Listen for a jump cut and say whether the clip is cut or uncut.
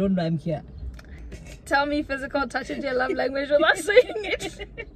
cut